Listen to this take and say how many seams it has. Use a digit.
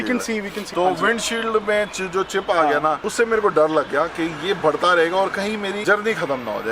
1